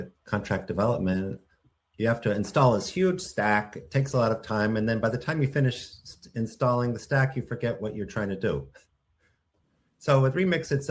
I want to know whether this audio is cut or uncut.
uncut